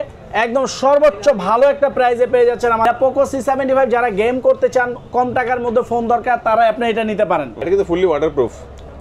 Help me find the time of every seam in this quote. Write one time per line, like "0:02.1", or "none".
0:02.8
0:07.6